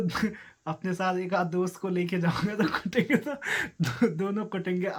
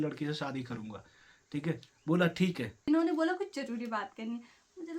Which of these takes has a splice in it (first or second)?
second